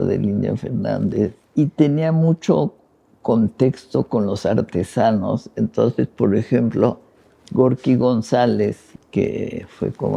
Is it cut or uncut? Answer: cut